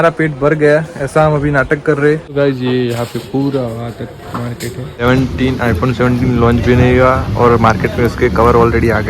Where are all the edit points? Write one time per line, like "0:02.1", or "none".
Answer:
0:02.3
0:05.0